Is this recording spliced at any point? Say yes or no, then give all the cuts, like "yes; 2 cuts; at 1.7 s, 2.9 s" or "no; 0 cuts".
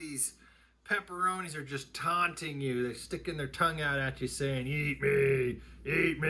no; 0 cuts